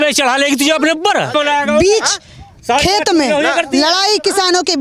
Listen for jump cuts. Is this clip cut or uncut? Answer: cut